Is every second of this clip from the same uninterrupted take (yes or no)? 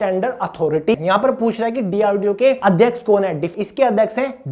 no